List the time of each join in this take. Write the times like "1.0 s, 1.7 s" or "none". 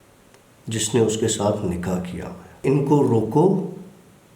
2.6 s